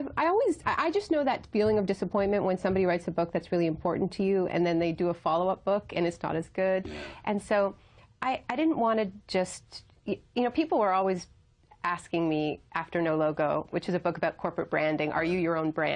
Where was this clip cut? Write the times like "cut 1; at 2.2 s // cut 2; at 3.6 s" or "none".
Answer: cut 1; at 9.0 s